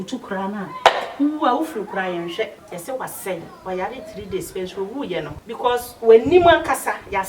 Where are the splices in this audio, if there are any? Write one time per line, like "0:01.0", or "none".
0:02.6
0:05.4